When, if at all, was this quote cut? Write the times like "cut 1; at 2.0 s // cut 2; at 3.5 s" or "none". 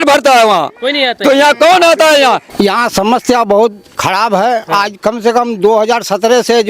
cut 1; at 2.4 s